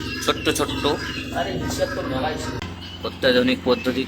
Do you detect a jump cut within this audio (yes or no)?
yes